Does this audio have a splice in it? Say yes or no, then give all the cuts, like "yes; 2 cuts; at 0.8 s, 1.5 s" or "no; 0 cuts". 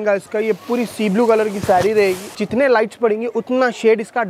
yes; 1 cut; at 2.4 s